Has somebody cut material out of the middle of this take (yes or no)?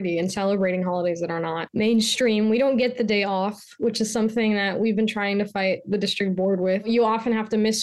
yes